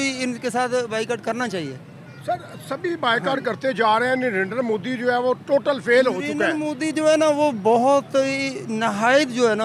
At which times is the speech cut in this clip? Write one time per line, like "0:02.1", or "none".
none